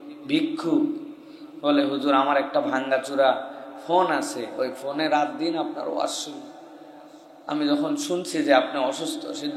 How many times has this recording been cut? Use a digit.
0